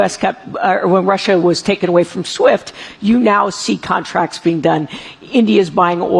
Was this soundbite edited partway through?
no; 0 cuts

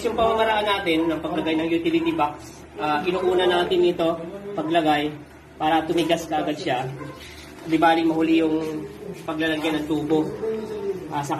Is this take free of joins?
yes; 0 cuts

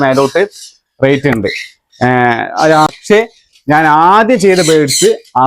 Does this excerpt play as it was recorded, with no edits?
no; 1 cut; at 2.9 s

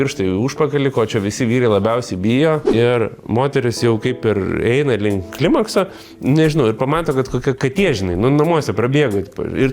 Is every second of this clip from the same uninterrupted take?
no; 1 cut; at 2.7 s

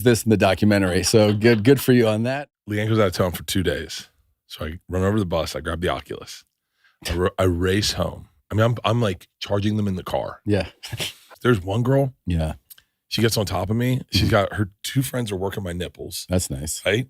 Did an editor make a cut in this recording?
yes; 2 cuts; at 2.4 s, 11.4 s

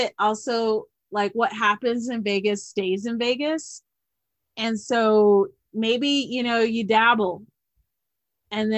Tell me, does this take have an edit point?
no; 0 cuts

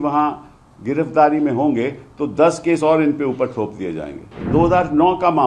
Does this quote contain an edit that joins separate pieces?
yes; 1 cut; at 4.5 s

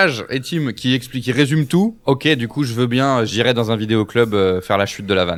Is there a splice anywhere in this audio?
no; 0 cuts

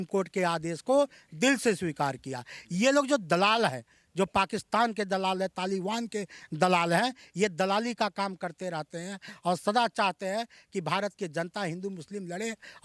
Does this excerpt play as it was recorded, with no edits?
yes; 0 cuts

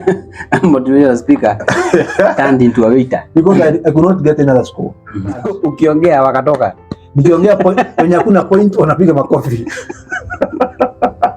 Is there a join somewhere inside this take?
yes; 1 cut; at 5.5 s

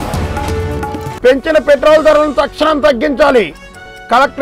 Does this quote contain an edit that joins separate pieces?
yes; 1 cut; at 1.2 s

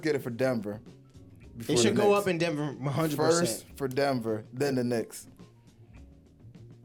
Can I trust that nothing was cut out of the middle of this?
yes; 0 cuts

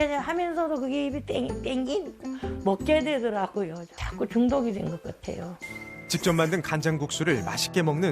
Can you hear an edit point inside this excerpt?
yes; 1 cut; at 5.6 s

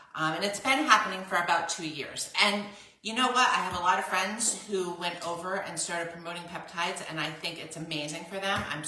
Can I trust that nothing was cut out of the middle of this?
yes; 0 cuts

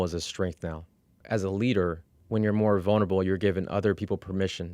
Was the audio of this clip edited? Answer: yes; 2 cuts; at 1.2 s, 2.1 s

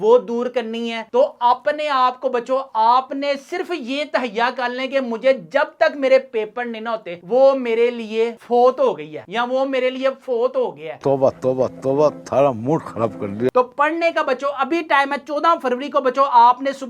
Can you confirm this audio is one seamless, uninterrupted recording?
no; 2 cuts; at 1.0 s, 13.5 s

